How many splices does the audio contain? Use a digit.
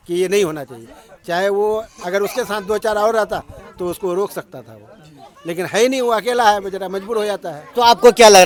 0